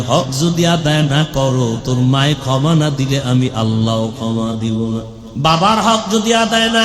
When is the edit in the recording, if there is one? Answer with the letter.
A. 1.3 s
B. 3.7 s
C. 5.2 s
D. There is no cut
C